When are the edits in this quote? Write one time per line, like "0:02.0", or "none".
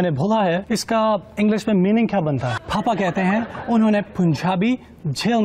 0:02.6